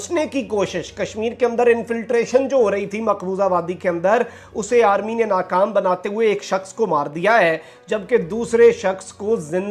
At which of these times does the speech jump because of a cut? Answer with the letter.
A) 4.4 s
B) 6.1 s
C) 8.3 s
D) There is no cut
D